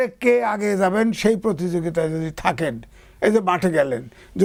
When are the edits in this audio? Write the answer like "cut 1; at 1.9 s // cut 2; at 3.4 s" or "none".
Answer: none